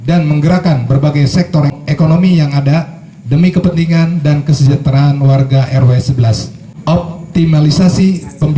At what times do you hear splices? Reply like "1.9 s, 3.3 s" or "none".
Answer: 1.7 s, 6.7 s